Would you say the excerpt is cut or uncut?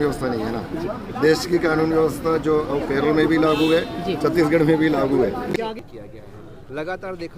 cut